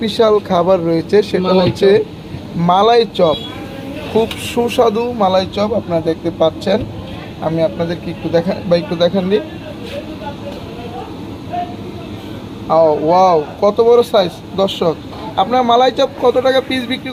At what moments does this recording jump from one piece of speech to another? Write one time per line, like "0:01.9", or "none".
none